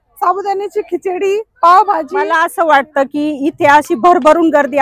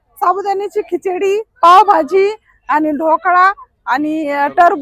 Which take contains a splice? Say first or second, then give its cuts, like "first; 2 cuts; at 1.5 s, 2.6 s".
first; 1 cut; at 2.3 s